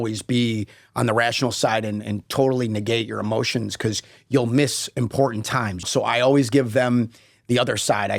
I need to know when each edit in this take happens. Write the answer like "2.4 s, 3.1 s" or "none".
5.9 s